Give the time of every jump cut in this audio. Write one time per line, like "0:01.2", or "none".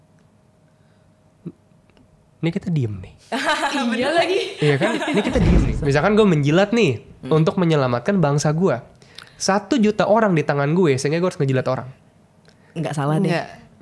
0:05.7